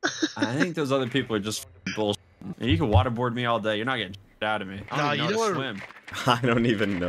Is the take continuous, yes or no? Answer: yes